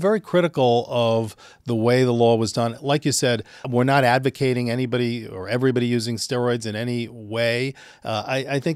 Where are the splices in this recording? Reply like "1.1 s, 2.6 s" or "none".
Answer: 3.6 s